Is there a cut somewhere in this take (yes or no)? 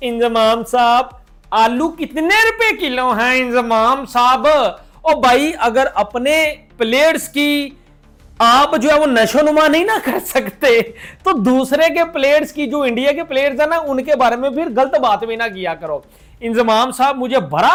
no